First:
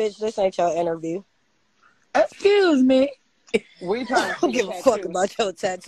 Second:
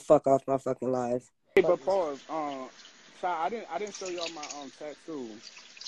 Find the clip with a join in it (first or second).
second